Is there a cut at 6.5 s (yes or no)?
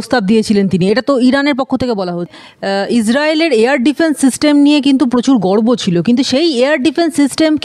no